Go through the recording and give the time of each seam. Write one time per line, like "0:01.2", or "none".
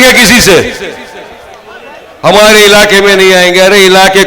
0:02.1